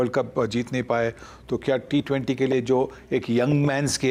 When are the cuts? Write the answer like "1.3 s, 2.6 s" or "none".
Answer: none